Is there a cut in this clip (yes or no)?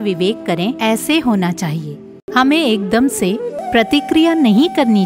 yes